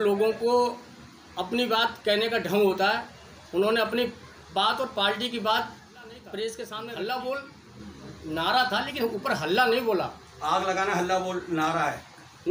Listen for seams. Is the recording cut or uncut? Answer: cut